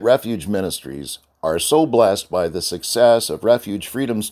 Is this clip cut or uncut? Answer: uncut